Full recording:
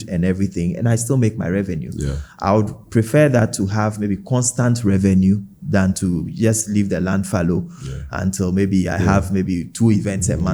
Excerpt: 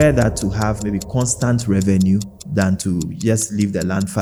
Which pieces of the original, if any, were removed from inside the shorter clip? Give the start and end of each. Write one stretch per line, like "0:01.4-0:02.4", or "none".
none

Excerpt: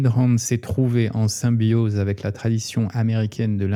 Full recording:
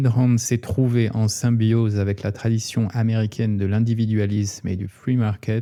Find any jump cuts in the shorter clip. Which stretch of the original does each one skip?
none

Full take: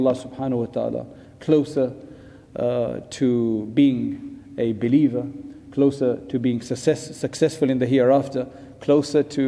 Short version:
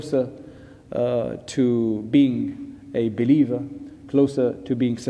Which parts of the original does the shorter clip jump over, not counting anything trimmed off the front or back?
none

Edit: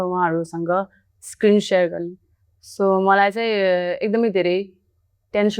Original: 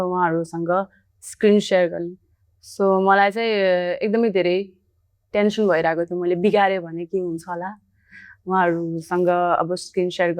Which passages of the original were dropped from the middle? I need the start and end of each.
none

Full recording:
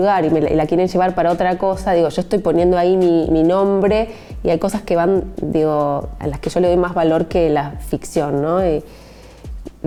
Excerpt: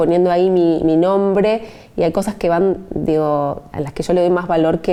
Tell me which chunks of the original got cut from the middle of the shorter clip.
none

